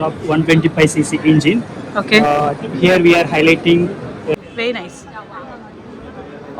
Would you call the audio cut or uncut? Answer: cut